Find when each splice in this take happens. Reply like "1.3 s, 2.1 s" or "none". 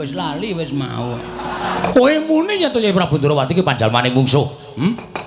1.8 s